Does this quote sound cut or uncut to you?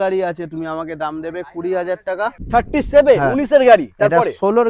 cut